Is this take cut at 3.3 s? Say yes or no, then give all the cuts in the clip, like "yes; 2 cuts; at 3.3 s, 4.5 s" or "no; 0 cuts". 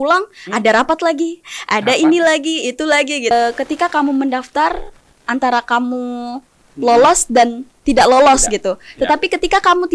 yes; 1 cut; at 3.3 s